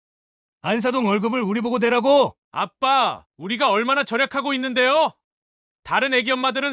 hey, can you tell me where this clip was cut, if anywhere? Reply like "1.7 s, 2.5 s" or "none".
none